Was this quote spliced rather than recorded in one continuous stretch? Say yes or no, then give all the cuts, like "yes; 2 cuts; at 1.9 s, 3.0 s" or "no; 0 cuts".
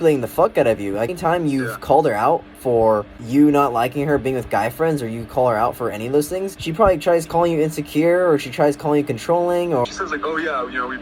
yes; 4 cuts; at 1.1 s, 3.2 s, 6.6 s, 9.8 s